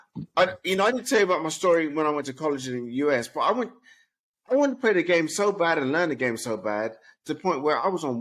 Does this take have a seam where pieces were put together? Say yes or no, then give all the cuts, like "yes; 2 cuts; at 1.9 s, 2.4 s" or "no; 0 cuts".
no; 0 cuts